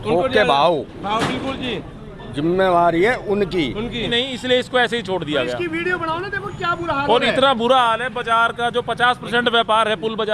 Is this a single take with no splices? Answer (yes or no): no